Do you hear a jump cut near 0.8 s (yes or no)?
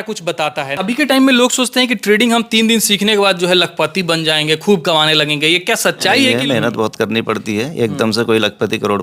yes